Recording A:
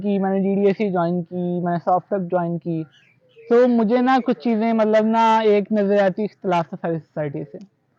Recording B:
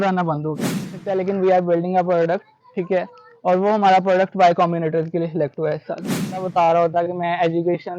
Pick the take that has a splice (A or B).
B